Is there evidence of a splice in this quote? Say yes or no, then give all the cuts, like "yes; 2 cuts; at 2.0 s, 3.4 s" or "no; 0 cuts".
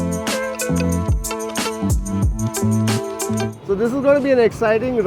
yes; 1 cut; at 3.5 s